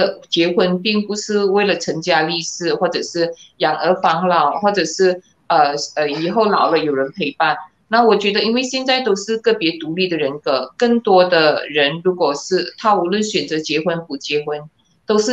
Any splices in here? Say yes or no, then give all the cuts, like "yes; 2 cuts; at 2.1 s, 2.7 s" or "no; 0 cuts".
no; 0 cuts